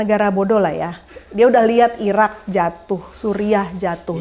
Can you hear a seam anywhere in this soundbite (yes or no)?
no